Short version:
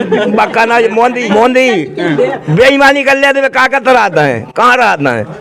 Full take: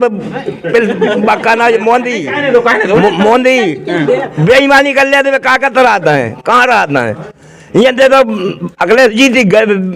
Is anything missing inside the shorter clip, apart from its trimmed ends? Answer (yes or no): yes